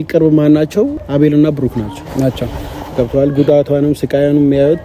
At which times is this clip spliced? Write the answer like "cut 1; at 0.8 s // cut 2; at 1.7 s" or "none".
cut 1; at 1.0 s